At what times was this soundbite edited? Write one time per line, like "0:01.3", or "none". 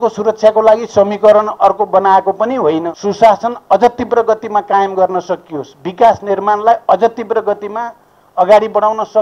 0:03.0